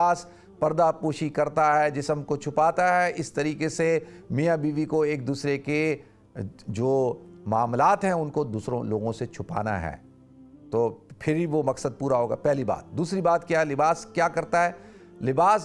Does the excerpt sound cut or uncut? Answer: uncut